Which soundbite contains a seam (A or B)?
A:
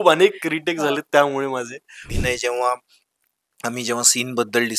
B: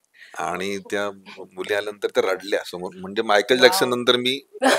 A